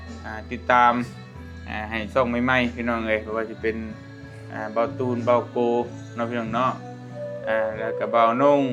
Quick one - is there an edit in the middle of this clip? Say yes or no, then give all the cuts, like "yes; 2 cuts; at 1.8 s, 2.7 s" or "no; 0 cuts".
no; 0 cuts